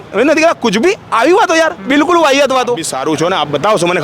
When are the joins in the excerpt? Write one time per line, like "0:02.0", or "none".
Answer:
0:02.9